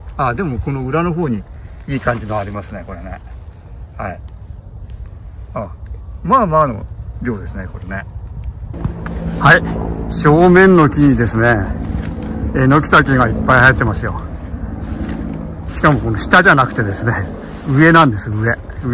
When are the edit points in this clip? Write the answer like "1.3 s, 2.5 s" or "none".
8.7 s